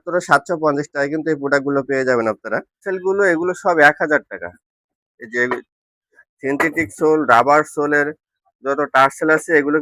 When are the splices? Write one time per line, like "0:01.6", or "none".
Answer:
0:02.8